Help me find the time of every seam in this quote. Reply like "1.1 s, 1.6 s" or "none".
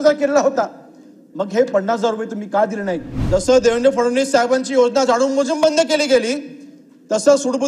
3.1 s